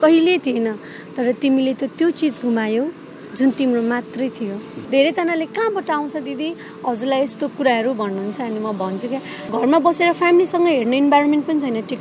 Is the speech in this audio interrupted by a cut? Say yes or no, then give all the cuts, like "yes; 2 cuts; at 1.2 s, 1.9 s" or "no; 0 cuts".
yes; 2 cuts; at 4.7 s, 9.5 s